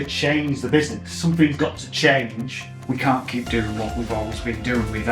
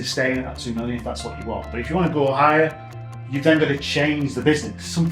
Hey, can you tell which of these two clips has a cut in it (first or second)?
first